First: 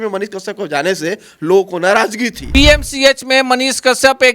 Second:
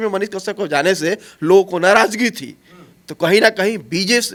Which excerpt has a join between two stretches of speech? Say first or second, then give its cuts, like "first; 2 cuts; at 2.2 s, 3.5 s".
first; 1 cut; at 2.4 s